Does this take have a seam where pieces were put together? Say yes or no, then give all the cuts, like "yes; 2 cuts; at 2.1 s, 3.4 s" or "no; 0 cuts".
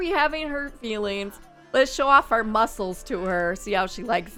no; 0 cuts